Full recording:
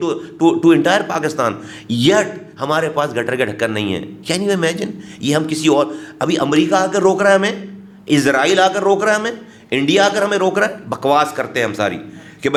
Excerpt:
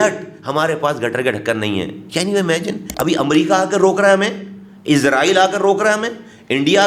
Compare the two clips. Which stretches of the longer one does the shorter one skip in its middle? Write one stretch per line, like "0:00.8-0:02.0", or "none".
0:05.0-0:06.1